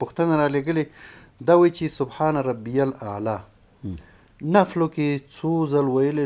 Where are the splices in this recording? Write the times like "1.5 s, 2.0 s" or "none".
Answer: none